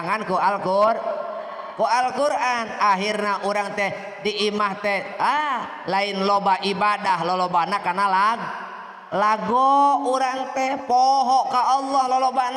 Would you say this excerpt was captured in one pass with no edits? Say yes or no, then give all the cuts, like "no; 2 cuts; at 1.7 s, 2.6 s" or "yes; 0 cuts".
yes; 0 cuts